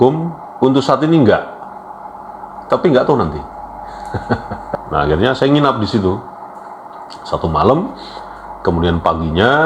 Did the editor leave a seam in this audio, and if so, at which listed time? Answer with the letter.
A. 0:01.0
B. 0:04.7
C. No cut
B